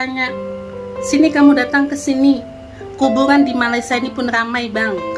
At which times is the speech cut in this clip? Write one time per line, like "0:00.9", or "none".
none